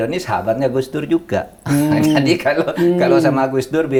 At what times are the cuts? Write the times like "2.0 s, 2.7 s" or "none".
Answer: none